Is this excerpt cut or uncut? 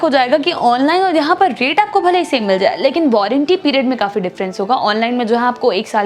uncut